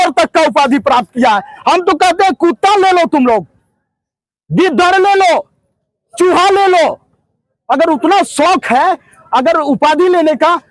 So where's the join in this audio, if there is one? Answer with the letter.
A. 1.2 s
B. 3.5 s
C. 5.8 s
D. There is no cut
D